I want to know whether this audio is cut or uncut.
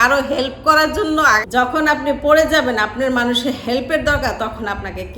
cut